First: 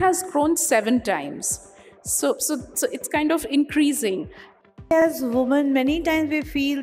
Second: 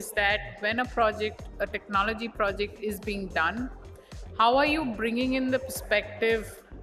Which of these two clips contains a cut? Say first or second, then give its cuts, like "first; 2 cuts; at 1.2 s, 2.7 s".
first; 1 cut; at 5.0 s